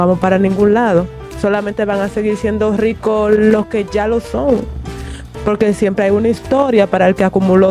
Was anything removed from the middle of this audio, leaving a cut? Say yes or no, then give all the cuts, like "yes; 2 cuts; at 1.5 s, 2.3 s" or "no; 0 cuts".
no; 0 cuts